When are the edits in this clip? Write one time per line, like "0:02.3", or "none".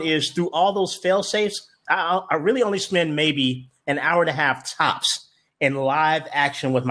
0:01.8